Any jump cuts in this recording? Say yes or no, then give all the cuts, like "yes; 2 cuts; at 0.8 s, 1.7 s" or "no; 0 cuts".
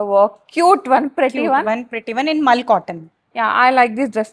no; 0 cuts